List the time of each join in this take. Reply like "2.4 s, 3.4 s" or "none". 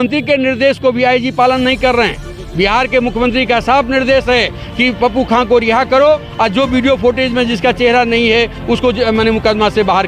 none